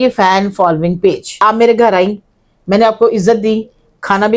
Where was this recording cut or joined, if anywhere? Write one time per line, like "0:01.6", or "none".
0:01.4